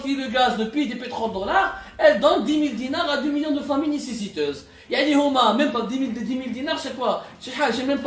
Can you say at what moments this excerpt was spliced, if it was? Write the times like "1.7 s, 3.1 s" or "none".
none